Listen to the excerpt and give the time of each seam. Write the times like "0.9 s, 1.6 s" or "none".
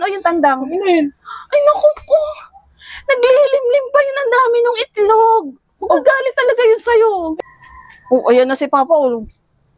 7.3 s